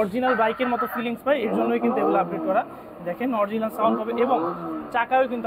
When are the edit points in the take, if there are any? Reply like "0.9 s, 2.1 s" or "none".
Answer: none

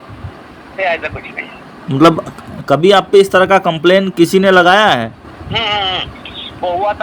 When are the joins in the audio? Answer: 5.3 s

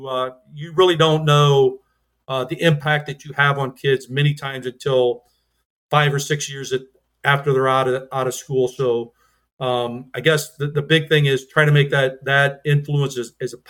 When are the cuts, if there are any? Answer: none

